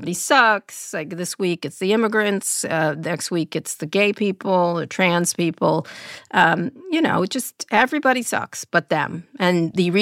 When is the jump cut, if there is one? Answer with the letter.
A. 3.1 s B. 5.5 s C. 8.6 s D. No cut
C